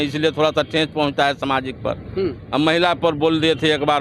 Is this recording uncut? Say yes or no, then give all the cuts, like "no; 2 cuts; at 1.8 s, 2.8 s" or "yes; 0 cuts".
yes; 0 cuts